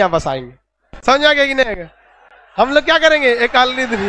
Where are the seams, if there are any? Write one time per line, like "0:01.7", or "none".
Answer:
none

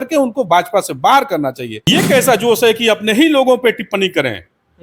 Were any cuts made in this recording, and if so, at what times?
0:01.7

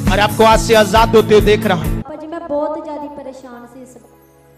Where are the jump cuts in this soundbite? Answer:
0:02.0

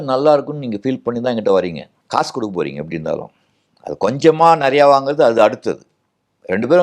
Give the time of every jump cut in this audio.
0:01.9

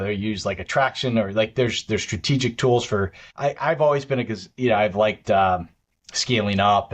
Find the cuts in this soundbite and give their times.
0:03.2

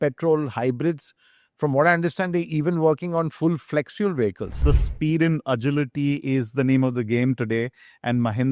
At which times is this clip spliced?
0:04.6

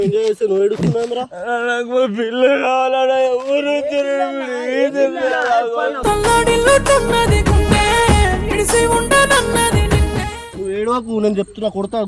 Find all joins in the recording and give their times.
0:10.4

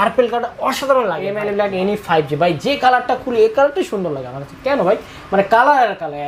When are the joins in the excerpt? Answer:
0:01.4

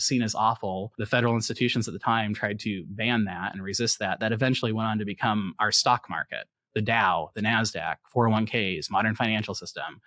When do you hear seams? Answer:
0:00.9

